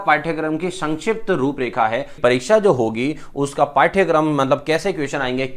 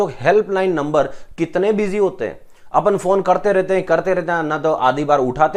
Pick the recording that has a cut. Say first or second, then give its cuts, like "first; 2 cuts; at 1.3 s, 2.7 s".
first; 1 cut; at 2.1 s